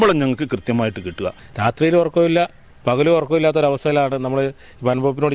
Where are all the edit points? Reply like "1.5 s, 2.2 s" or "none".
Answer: 1.4 s